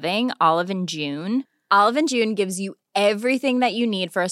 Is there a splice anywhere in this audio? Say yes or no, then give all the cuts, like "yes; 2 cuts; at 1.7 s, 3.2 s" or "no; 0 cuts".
no; 0 cuts